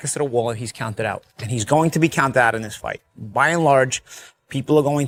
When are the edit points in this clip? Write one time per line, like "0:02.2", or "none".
none